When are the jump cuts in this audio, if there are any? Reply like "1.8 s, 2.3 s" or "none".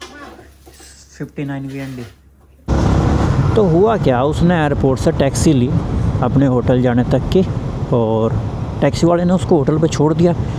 2.7 s